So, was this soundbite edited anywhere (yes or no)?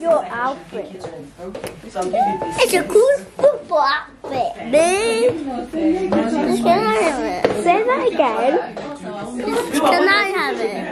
no